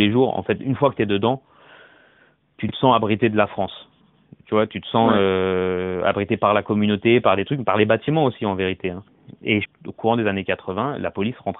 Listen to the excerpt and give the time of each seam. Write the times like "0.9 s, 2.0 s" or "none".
9.5 s